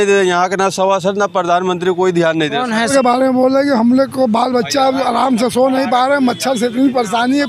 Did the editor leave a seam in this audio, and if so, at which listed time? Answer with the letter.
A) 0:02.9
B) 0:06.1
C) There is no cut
A